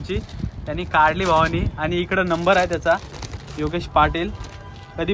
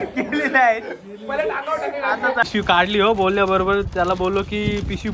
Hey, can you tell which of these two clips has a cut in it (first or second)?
second